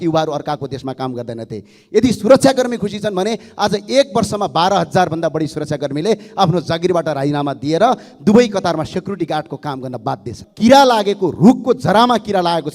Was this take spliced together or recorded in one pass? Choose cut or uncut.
cut